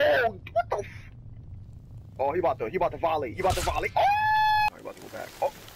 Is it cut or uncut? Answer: cut